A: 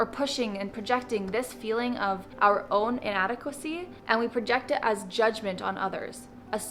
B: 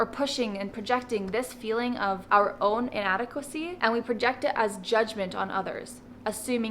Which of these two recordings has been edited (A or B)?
B